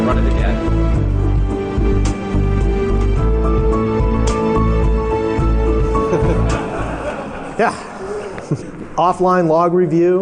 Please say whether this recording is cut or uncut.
uncut